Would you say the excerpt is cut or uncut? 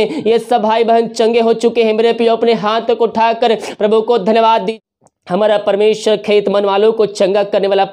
cut